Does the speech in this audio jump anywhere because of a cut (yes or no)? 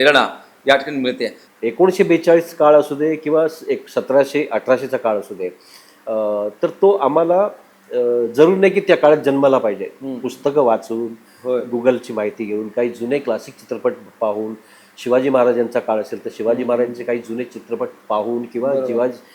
yes